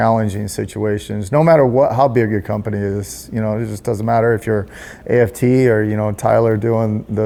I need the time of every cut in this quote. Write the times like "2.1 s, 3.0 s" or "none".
none